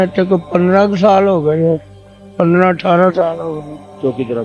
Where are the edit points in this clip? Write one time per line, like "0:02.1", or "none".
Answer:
none